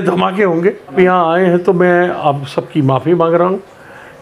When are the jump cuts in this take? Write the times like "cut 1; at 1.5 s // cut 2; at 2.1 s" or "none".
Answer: cut 1; at 0.9 s

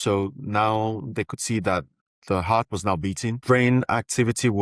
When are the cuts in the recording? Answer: cut 1; at 3.4 s

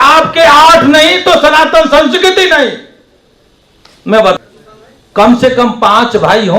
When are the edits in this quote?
cut 1; at 4.4 s

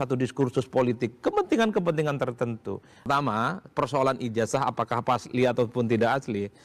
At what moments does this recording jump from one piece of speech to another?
cut 1; at 3.1 s

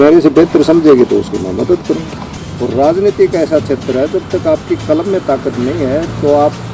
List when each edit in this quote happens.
cut 1; at 2.2 s

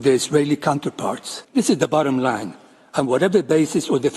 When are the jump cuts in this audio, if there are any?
cut 1; at 1.3 s

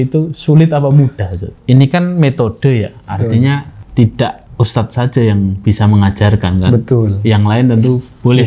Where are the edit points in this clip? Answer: cut 1; at 1.6 s // cut 2; at 3.8 s // cut 3; at 4.4 s

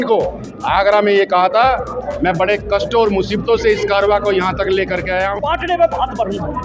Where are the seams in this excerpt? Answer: cut 1; at 5.3 s

